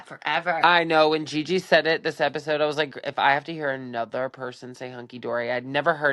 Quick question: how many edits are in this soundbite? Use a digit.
0